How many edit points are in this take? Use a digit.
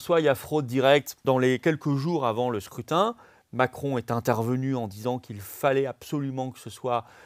1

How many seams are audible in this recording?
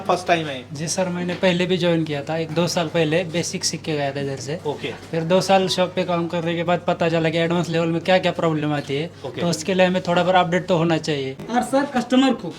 1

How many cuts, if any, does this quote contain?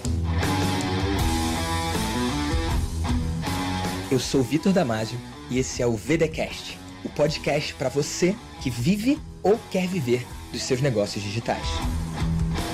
0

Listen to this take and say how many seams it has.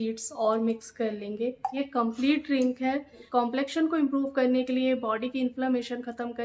2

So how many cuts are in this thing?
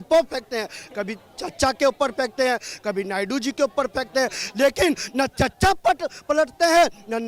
0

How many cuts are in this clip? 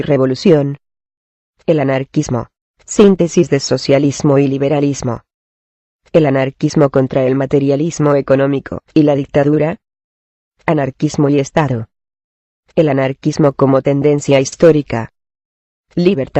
1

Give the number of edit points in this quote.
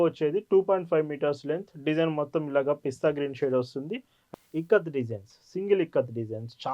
1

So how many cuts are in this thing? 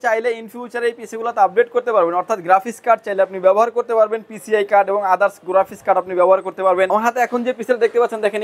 1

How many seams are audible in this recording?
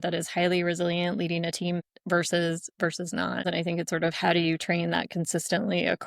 2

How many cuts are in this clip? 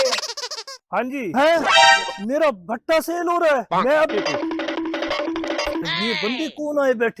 3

